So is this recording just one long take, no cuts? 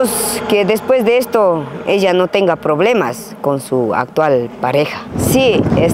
yes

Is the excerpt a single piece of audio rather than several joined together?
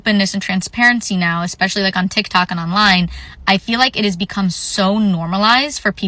yes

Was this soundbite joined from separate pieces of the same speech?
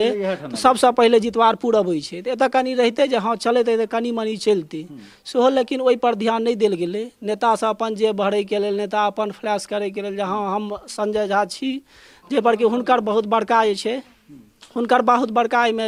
no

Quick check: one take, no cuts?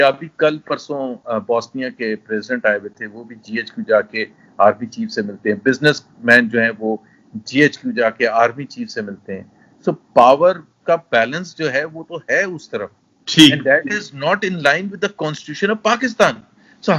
yes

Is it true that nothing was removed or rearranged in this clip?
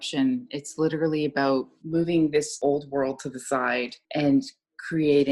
no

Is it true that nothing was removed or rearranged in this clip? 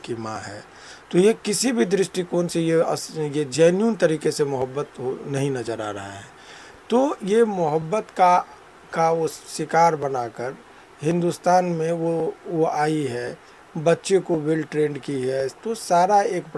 yes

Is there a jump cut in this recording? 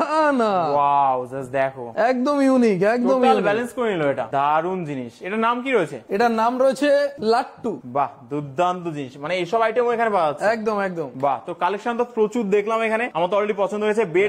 no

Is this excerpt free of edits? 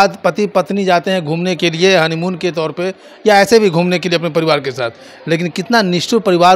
yes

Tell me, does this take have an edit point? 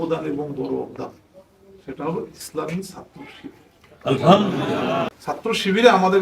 yes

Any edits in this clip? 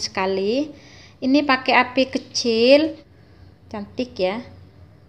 yes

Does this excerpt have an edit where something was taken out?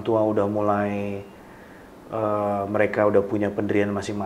no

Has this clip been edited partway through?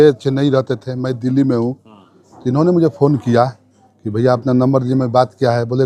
no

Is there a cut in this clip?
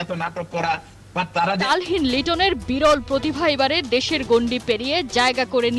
yes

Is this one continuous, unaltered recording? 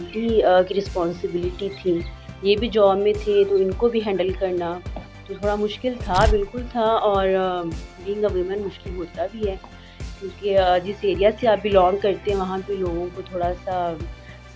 yes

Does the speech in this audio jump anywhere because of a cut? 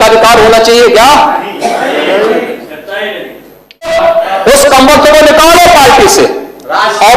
yes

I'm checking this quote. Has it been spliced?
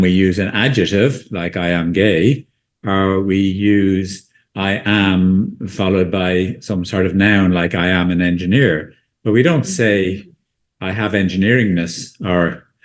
no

